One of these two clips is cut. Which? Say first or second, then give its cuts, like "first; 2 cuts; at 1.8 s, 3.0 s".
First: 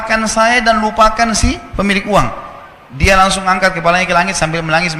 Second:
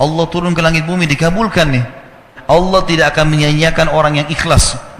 second; 1 cut; at 2.3 s